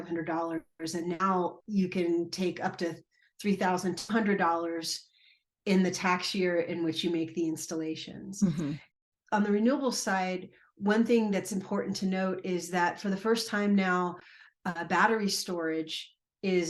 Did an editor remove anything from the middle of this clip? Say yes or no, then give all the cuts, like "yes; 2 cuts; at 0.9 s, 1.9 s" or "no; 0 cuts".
yes; 1 cut; at 8.9 s